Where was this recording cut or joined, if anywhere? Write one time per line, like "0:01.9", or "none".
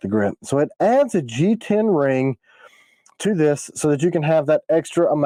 none